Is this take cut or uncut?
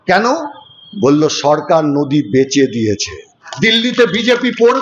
cut